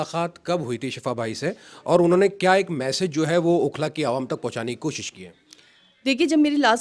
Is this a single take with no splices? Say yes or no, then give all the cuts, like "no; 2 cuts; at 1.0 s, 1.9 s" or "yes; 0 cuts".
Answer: yes; 0 cuts